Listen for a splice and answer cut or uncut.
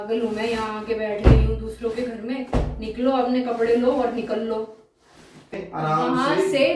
cut